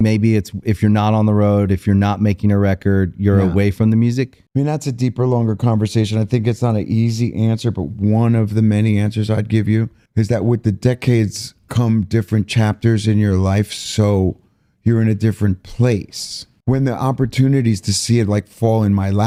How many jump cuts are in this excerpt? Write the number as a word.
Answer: zero